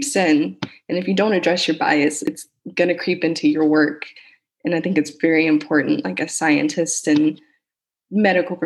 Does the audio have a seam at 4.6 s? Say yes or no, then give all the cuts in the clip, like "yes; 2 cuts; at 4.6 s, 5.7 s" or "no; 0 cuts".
no; 1 cut; at 2.2 s